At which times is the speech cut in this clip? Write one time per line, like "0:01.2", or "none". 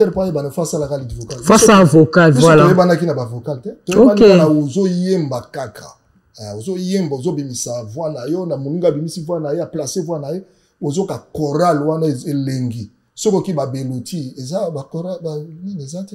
none